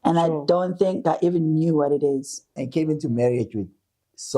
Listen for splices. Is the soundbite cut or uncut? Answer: cut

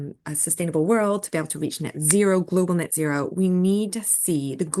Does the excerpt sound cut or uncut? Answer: uncut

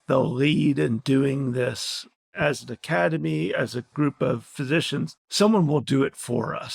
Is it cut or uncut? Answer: uncut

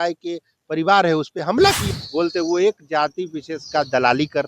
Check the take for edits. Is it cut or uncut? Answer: cut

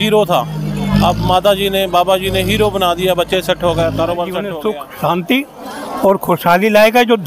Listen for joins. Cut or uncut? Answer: cut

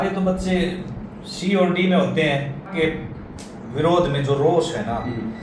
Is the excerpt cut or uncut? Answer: cut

